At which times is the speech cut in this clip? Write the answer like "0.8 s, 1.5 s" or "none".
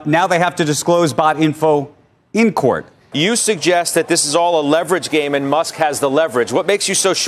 3.0 s